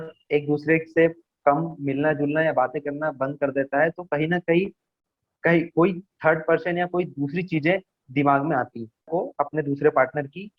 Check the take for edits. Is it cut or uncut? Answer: cut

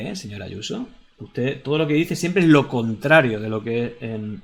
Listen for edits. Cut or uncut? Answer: uncut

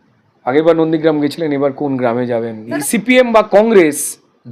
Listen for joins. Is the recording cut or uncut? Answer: cut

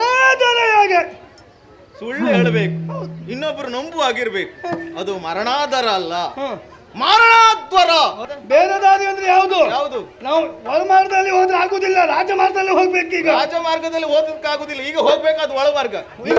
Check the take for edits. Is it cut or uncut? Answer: cut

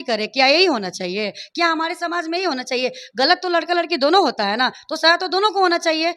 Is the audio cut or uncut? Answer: uncut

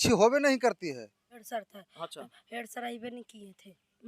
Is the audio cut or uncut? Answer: cut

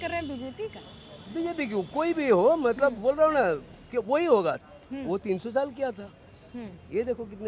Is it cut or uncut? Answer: uncut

